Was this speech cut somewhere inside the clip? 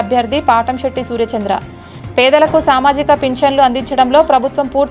no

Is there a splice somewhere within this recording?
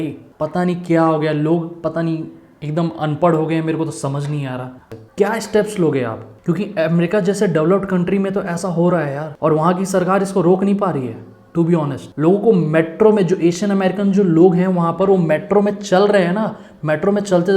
yes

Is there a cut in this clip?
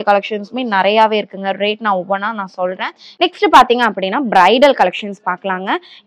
yes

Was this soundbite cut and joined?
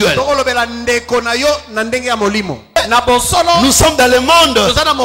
yes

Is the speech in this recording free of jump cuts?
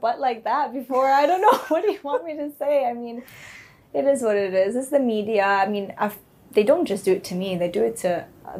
yes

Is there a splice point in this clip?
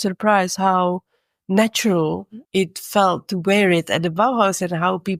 no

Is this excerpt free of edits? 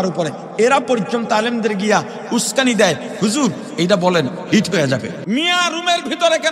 no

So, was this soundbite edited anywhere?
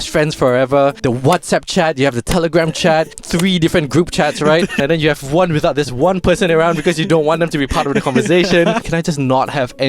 yes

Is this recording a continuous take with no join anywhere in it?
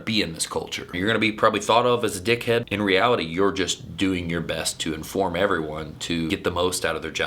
no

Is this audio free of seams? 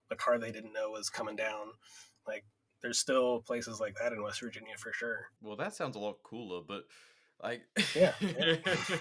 no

